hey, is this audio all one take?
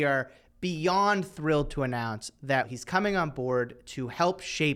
no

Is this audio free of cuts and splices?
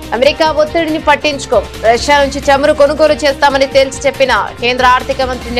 yes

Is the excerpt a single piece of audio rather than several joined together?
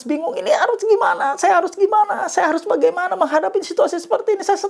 yes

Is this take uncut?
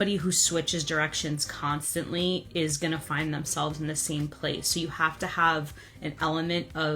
yes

